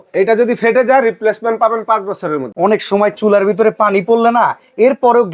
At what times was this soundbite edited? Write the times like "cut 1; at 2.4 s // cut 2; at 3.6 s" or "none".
cut 1; at 2.5 s

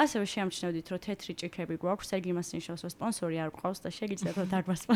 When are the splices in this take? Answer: none

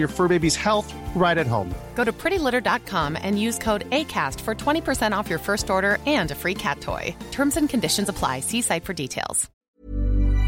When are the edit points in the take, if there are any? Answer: cut 1; at 9.5 s

